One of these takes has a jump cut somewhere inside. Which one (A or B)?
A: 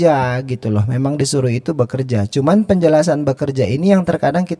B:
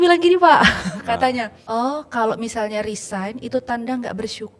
B